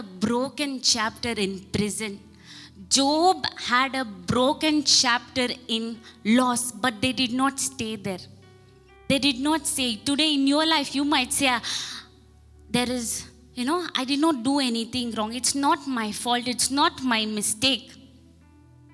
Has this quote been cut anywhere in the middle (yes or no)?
no